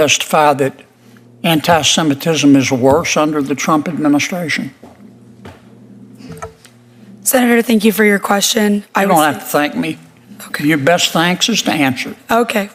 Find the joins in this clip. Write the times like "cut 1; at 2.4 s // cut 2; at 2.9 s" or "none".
none